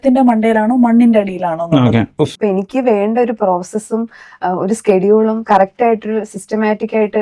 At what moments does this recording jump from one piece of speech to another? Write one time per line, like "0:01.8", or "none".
0:02.3